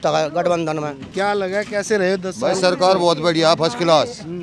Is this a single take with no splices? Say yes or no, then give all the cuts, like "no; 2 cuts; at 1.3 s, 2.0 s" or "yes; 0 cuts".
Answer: no; 1 cut; at 1.0 s